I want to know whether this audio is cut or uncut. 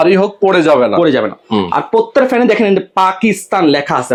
uncut